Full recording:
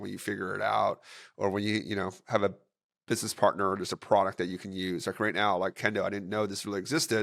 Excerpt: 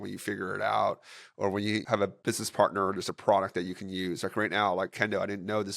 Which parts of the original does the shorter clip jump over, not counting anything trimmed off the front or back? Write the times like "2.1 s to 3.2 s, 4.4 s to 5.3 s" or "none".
1.9 s to 2.7 s